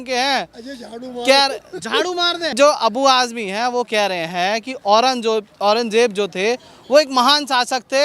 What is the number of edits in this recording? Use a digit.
1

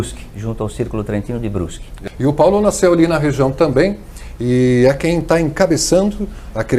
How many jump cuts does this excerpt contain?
1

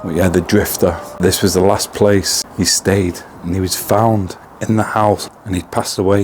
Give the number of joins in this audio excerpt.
2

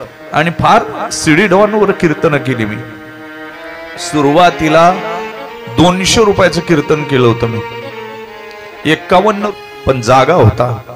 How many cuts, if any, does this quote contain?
1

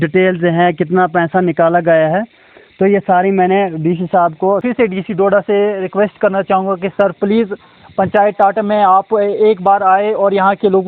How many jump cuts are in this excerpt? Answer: 1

